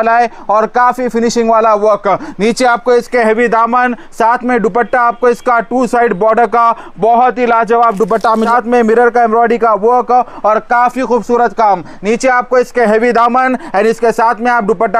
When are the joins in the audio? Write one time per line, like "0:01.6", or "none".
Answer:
0:08.5